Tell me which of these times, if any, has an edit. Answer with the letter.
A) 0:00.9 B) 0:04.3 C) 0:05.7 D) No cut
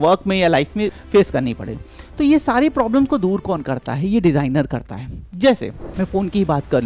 A